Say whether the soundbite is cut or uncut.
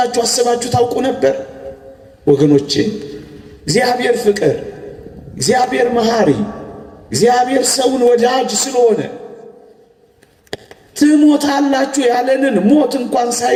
uncut